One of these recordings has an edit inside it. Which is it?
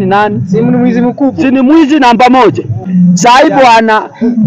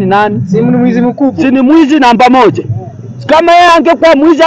first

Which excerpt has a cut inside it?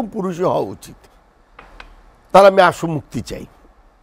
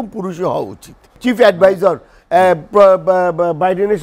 second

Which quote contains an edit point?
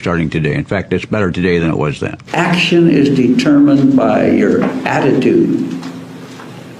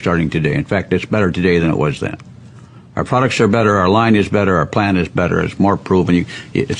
first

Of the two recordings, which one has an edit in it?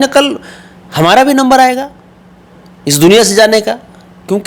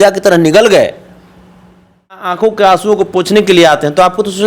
second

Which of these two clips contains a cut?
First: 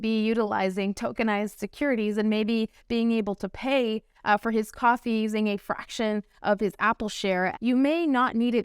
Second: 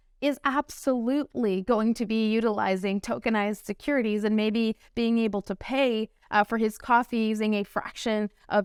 first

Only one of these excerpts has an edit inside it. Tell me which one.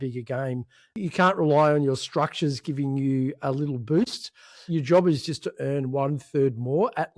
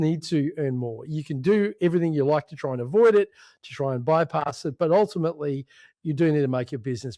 first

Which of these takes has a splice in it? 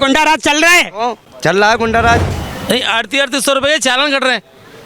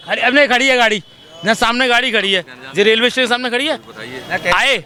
first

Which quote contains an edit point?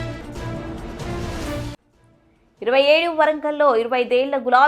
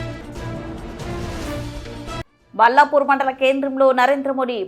first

